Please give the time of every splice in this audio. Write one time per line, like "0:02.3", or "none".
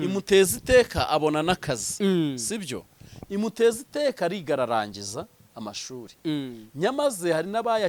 none